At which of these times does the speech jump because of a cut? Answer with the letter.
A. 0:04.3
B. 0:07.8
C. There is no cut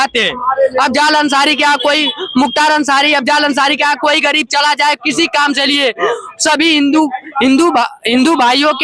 C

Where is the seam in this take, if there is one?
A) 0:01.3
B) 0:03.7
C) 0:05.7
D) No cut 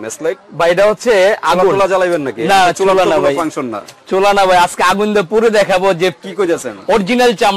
D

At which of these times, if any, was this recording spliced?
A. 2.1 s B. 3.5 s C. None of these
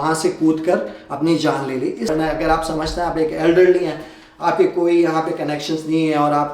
A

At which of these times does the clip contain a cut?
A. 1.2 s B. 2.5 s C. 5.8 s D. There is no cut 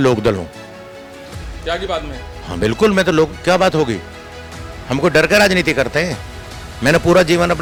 D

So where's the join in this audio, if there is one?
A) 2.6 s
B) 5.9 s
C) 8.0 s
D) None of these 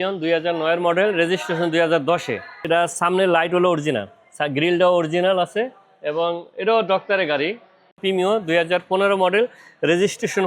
C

